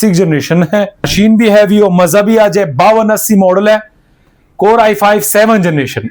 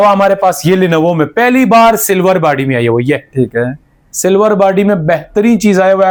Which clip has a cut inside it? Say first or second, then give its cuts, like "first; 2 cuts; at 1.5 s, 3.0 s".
first; 1 cut; at 1.0 s